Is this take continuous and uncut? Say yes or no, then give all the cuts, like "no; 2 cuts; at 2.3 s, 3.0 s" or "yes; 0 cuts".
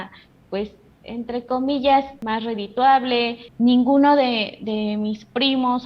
no; 2 cuts; at 2.2 s, 3.4 s